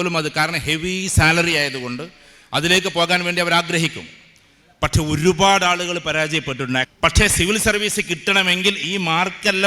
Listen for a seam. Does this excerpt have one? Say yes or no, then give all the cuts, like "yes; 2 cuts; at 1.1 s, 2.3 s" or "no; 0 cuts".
yes; 1 cut; at 6.9 s